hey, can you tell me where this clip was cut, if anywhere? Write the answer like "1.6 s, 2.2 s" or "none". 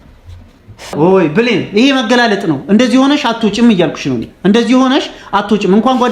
0.9 s